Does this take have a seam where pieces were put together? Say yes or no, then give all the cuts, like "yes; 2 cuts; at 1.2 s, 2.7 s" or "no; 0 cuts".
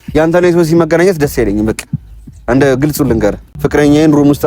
yes; 1 cut; at 3.5 s